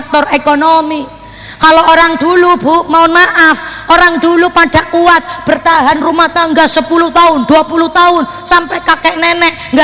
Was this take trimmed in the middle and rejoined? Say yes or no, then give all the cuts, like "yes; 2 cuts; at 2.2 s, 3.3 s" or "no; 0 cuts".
no; 0 cuts